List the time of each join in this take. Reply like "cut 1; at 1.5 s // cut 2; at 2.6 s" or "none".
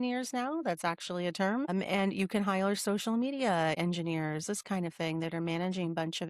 cut 1; at 1.7 s // cut 2; at 3.8 s